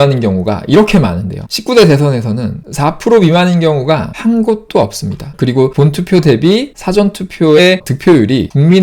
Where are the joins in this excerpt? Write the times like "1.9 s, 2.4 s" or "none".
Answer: none